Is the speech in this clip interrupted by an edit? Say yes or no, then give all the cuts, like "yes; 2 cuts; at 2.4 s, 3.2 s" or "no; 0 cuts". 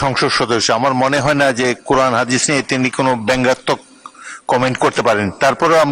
no; 0 cuts